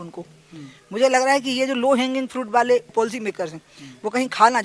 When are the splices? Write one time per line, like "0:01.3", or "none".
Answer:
0:02.9